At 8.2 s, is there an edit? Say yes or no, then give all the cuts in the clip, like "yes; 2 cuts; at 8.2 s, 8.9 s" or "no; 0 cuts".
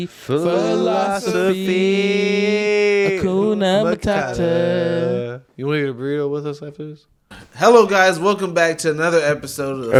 no; 0 cuts